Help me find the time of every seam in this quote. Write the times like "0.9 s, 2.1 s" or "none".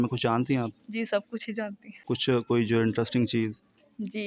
1.9 s